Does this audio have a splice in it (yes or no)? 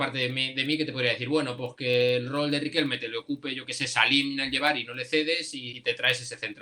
yes